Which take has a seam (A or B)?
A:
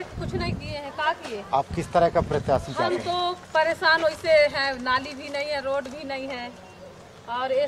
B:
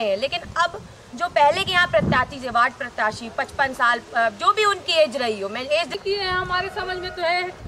B